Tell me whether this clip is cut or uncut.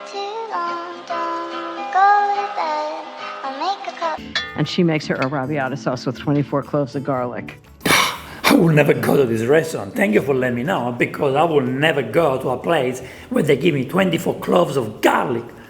cut